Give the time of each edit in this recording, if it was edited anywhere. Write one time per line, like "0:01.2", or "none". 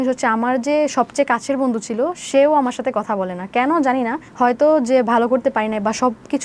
none